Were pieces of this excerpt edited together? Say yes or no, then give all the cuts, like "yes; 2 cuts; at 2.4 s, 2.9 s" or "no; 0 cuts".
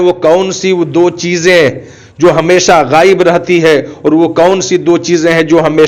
no; 0 cuts